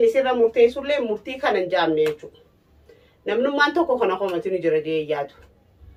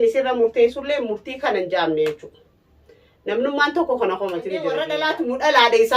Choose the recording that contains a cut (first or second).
second